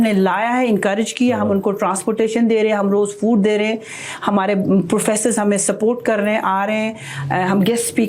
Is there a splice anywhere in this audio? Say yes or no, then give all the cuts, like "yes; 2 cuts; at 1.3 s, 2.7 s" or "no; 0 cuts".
no; 0 cuts